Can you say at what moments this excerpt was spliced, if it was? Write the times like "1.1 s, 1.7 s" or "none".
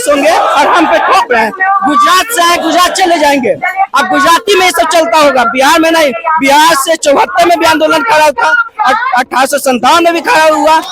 none